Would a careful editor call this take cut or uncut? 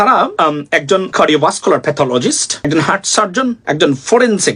cut